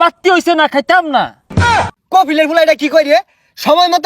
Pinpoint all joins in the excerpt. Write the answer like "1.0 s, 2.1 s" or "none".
1.6 s

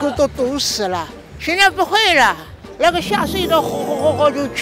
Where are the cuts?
none

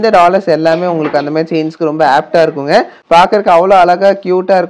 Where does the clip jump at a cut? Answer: none

